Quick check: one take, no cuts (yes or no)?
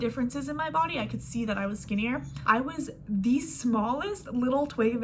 no